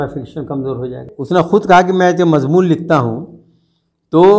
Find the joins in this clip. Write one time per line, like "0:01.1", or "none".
0:01.1